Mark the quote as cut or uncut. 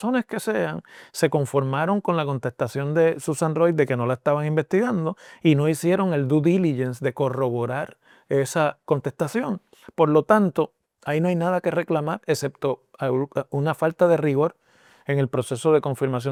uncut